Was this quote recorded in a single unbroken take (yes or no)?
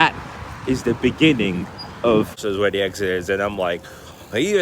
no